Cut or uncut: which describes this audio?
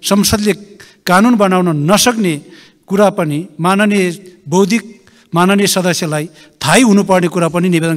uncut